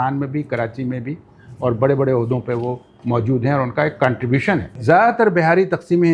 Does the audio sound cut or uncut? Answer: cut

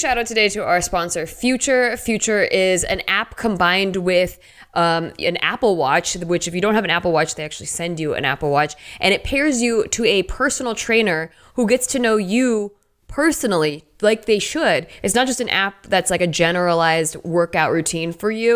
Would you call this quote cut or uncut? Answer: uncut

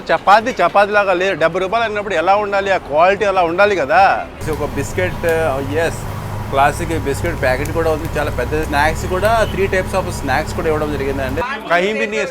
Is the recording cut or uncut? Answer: cut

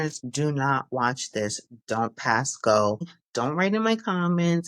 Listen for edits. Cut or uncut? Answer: cut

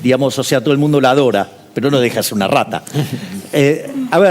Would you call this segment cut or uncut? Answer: uncut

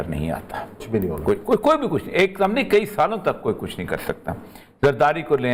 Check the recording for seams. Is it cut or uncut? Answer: uncut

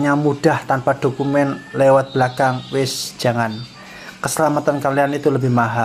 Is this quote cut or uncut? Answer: uncut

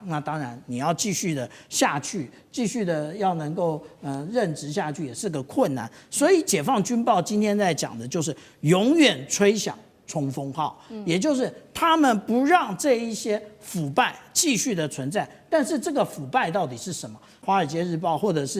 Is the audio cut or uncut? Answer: cut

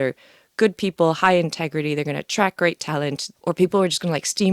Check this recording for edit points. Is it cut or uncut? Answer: cut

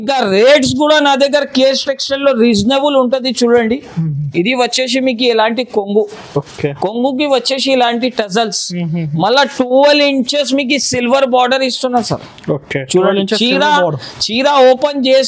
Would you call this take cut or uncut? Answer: uncut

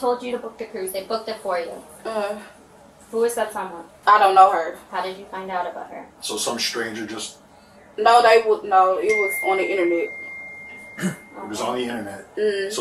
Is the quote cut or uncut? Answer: uncut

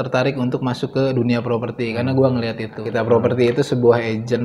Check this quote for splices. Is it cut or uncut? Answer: cut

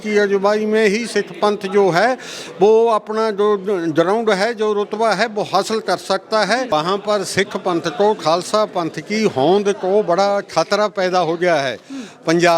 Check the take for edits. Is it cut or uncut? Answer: cut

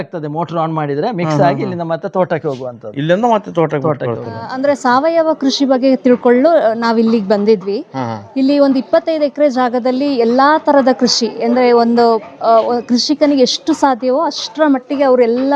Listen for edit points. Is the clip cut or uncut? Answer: cut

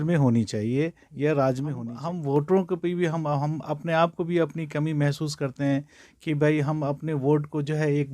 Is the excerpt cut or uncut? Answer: cut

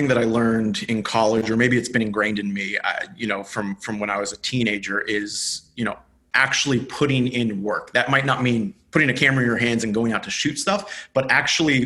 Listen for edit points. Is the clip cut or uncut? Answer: cut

